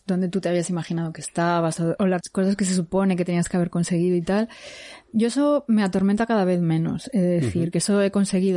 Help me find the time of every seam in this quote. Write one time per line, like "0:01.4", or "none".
0:02.0